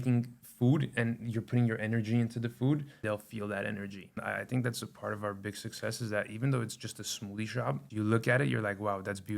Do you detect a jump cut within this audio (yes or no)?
yes